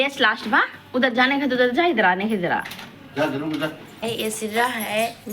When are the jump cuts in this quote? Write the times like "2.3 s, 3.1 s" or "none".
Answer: 3.9 s